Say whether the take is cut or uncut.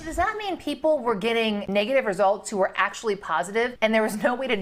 uncut